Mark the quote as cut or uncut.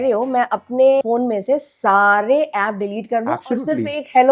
cut